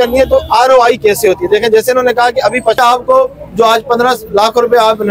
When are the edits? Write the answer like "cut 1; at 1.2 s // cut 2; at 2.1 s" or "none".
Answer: cut 1; at 2.8 s